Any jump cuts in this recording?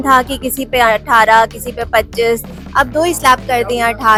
no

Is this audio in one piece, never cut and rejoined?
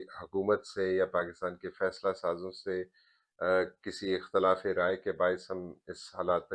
yes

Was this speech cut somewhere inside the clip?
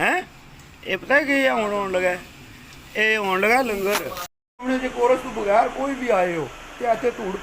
yes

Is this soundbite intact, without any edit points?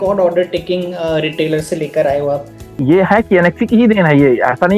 no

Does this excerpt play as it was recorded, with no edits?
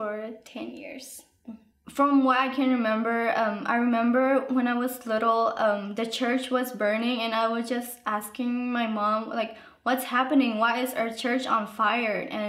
no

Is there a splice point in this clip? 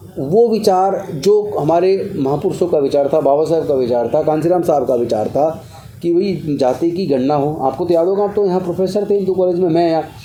no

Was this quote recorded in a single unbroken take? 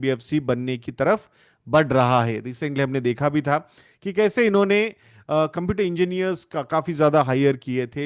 yes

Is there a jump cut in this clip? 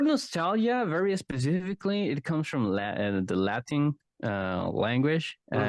no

